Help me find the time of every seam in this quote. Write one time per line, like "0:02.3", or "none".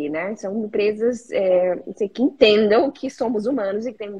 none